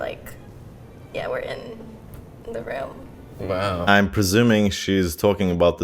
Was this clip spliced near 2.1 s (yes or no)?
no